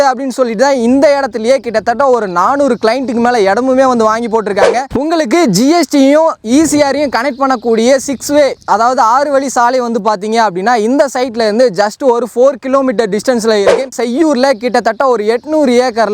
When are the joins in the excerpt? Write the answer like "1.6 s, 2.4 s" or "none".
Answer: 4.9 s, 13.9 s